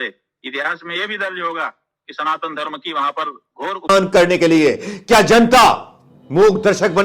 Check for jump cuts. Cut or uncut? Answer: cut